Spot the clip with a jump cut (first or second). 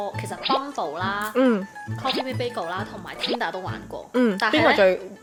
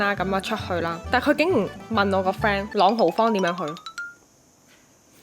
second